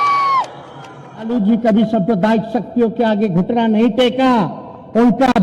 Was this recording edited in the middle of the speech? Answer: yes; 1 cut; at 1.3 s

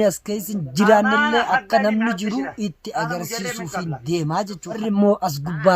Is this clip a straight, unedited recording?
no; 1 cut; at 4.8 s

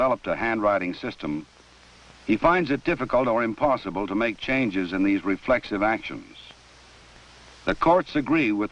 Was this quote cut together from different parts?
yes; 1 cut; at 7.8 s

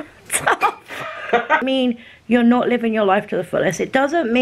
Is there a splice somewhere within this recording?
yes; 1 cut; at 1.6 s

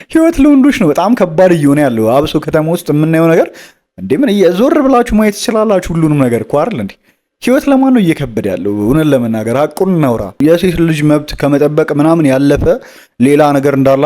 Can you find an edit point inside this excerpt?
yes; 1 cut; at 10.4 s

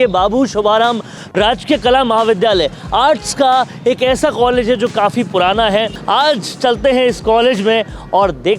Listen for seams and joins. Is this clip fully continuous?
no; 1 cut; at 6.0 s

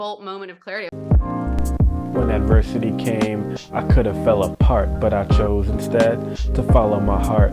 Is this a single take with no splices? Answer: no; 1 cut; at 0.9 s

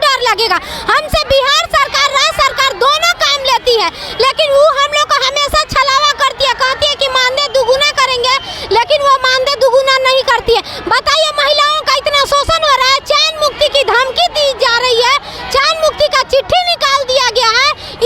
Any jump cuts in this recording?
no; 0 cuts

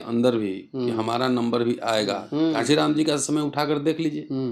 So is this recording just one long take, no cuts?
no; 1 cut; at 2.5 s

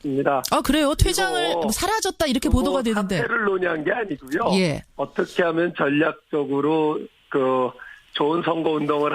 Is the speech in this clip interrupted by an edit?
yes; 1 cut; at 5.6 s

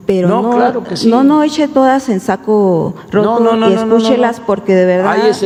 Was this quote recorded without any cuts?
yes; 0 cuts

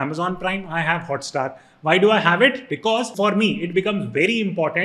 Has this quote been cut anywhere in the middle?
yes; 1 cut; at 3.1 s

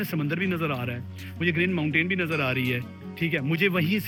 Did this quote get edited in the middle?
no; 0 cuts

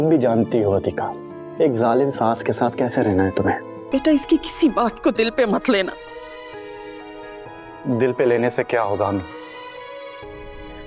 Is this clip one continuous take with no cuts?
no; 1 cut; at 3.7 s

